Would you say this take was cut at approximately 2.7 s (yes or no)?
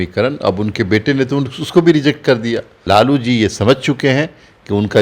yes